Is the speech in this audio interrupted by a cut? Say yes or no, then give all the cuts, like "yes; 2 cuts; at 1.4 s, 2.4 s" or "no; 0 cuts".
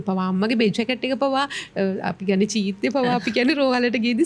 no; 0 cuts